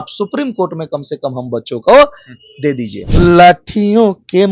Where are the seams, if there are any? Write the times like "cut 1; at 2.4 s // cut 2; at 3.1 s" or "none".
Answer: cut 1; at 3.0 s